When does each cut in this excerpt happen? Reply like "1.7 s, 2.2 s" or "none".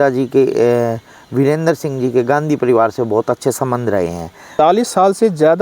4.5 s